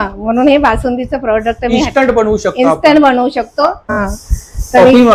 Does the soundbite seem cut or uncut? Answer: cut